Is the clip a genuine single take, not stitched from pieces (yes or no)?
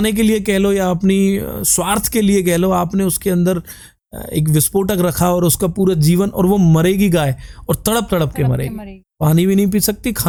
yes